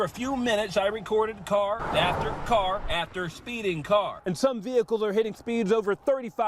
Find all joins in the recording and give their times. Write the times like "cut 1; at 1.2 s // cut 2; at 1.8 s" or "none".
cut 1; at 4.2 s